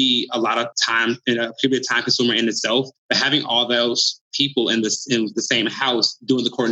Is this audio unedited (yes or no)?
yes